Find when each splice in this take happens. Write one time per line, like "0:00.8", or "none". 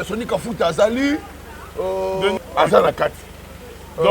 0:02.4